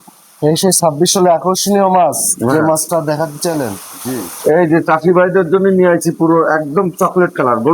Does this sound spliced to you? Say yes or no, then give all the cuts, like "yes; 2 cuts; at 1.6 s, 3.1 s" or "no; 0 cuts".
yes; 1 cut; at 3.9 s